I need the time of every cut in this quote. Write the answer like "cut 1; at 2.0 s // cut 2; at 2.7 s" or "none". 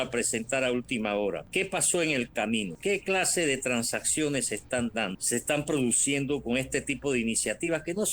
cut 1; at 1.4 s // cut 2; at 2.7 s // cut 3; at 5.2 s

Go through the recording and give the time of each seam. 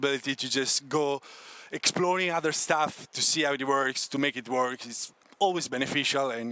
none

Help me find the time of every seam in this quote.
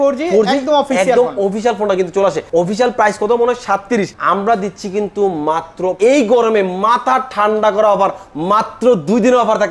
cut 1; at 2.4 s // cut 2; at 4.1 s // cut 3; at 5.9 s

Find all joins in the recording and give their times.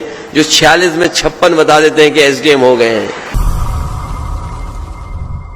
cut 1; at 3.3 s

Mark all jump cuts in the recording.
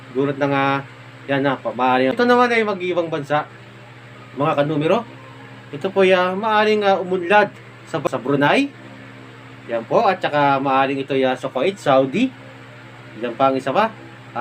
cut 1; at 2.1 s // cut 2; at 8.1 s

